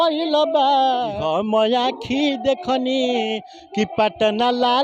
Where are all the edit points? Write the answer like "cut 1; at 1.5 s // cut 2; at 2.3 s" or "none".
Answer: cut 1; at 1.1 s